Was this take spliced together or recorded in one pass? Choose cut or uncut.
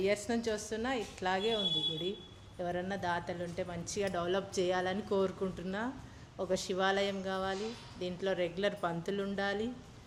uncut